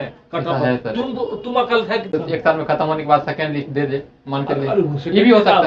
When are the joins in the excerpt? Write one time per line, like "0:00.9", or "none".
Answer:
0:02.1